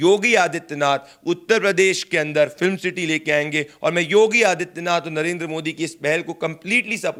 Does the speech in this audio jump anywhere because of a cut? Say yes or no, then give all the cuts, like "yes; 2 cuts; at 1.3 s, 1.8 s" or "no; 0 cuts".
no; 0 cuts